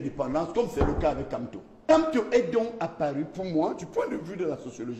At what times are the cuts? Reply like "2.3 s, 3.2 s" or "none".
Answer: 1.9 s

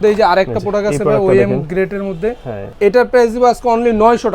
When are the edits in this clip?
2.7 s

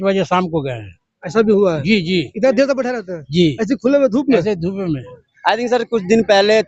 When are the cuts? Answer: 5.2 s

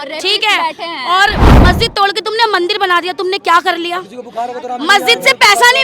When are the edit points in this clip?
1.5 s

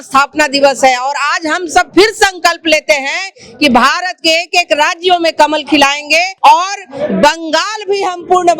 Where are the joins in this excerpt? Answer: 6.3 s

